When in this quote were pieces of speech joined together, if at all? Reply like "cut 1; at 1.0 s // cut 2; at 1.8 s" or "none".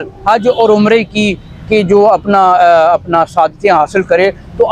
none